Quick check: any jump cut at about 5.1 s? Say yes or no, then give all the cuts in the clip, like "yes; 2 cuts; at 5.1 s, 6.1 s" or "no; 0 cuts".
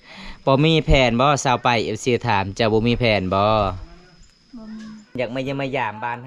yes; 1 cut; at 5.1 s